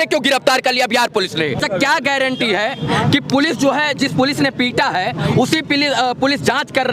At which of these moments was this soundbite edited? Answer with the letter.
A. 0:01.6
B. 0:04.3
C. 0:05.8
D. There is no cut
A